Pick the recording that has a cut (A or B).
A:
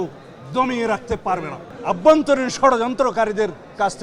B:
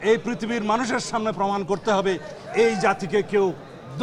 A